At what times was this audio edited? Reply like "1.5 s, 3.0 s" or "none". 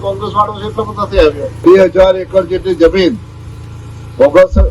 1.6 s